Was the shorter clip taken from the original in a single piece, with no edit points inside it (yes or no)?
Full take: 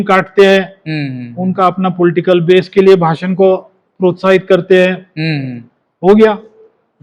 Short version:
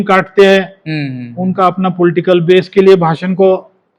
yes